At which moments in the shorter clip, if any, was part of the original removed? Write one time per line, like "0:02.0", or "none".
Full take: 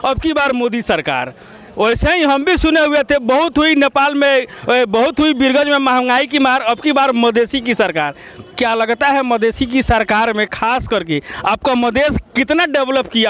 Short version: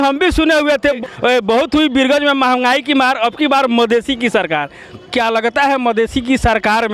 0:01.0